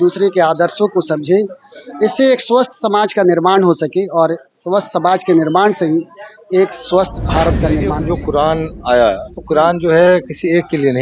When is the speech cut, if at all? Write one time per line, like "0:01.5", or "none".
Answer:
0:08.0